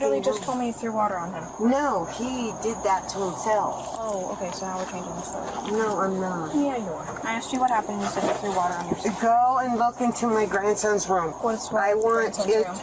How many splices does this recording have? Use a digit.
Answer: 0